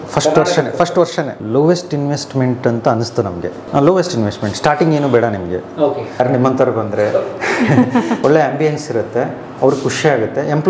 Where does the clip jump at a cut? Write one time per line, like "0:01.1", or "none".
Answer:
0:01.4
0:03.6
0:06.2
0:08.2